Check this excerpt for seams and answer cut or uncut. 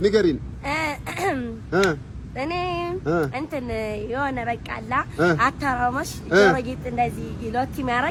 uncut